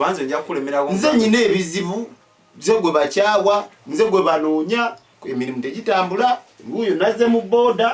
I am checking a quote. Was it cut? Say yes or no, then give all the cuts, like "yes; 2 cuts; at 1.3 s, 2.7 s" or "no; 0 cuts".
no; 0 cuts